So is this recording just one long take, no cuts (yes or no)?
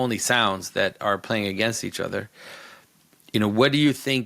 yes